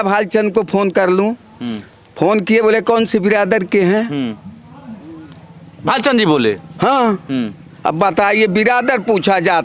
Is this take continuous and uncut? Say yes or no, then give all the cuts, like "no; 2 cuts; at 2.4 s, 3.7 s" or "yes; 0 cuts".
yes; 0 cuts